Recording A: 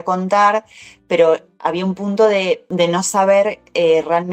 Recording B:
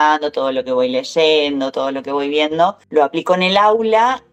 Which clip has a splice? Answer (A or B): A